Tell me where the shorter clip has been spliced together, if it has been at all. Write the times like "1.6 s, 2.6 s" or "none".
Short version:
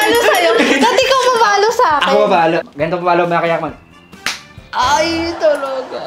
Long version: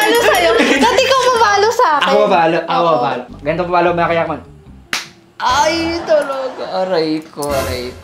2.6 s